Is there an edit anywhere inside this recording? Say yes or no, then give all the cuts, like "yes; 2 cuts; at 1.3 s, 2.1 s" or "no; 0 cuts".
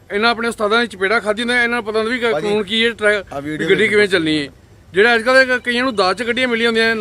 no; 0 cuts